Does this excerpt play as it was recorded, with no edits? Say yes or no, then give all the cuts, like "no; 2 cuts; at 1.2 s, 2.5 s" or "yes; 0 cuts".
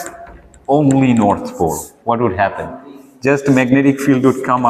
yes; 0 cuts